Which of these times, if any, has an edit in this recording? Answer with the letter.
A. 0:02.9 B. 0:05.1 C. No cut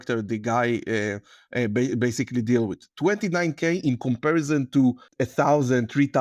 B